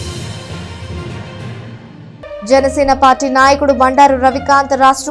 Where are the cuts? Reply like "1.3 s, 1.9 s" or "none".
2.1 s